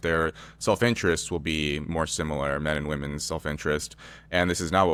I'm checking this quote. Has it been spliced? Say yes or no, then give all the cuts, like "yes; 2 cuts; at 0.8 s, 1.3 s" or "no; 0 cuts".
no; 0 cuts